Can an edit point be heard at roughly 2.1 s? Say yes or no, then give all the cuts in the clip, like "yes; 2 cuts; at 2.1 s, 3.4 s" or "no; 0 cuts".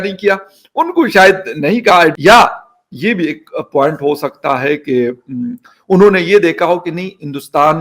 yes; 1 cut; at 2.1 s